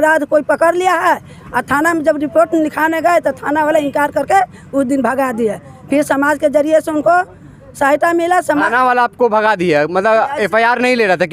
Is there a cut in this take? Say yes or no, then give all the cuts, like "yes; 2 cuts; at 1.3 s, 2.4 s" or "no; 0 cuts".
no; 0 cuts